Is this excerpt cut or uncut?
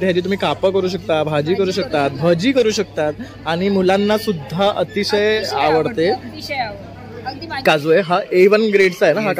cut